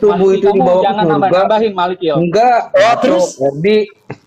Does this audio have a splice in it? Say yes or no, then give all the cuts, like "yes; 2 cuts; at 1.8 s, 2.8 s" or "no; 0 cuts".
no; 0 cuts